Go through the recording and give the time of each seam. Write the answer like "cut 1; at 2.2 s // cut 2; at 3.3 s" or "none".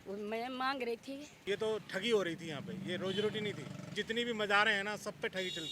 cut 1; at 1.4 s // cut 2; at 3.9 s